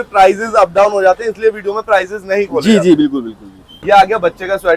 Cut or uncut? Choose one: cut